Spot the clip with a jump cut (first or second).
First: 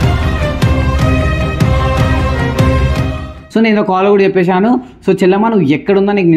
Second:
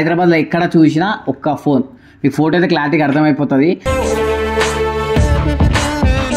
first